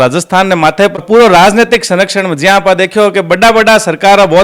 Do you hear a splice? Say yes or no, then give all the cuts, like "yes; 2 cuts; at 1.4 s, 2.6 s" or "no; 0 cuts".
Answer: yes; 1 cut; at 1.0 s